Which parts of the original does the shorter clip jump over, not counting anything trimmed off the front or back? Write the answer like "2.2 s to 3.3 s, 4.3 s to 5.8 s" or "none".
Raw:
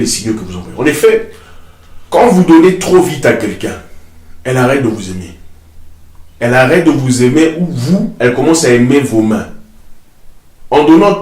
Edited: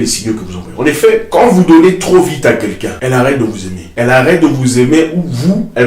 1.3 s to 2.1 s, 3.7 s to 4.3 s, 5.2 s to 6.2 s